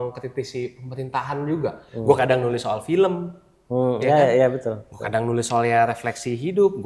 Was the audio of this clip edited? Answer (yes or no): no